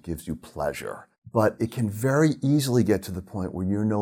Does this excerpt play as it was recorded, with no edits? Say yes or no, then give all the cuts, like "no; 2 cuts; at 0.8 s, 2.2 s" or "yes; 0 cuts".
no; 1 cut; at 1.1 s